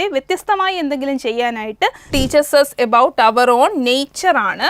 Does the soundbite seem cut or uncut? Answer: cut